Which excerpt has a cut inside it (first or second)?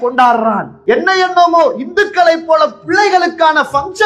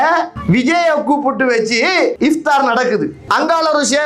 second